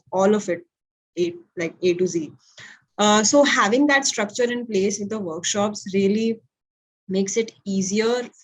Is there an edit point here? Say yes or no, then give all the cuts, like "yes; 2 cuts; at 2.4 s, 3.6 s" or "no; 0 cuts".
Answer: no; 0 cuts